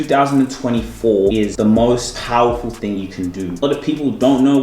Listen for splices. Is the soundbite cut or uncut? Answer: cut